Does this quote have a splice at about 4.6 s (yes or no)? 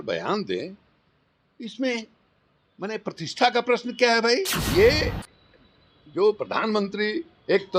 yes